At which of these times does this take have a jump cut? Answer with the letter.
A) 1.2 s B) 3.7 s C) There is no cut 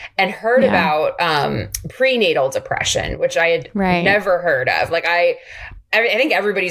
C